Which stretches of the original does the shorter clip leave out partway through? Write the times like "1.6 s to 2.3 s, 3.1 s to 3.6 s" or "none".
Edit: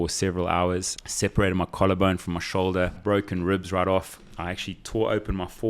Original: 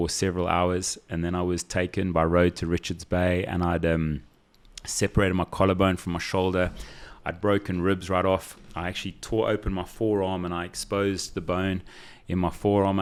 1.0 s to 4.8 s, 6.8 s to 7.3 s

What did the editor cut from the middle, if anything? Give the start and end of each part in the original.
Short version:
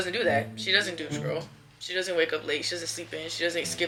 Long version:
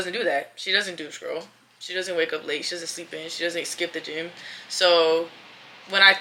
none

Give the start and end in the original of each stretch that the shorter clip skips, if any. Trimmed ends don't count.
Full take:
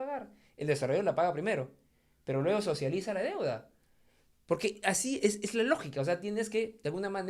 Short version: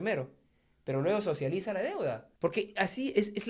3.7 s to 4.3 s

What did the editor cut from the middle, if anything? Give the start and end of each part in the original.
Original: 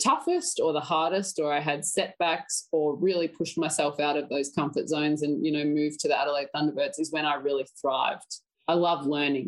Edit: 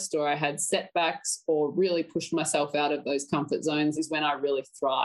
5.2 s to 7.0 s

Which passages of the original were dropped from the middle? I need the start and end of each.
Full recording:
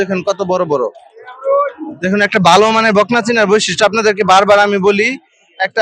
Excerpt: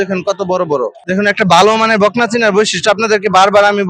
1.0 s to 1.9 s

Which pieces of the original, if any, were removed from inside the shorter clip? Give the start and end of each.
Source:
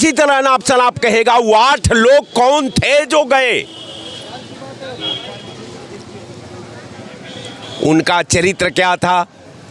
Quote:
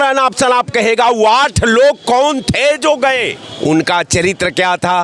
3.7 s to 7.6 s

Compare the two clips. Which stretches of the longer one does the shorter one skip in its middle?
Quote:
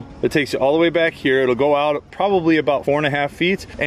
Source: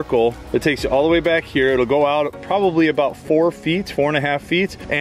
3.1 s to 3.9 s

